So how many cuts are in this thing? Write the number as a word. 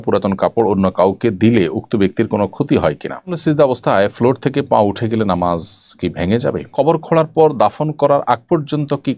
two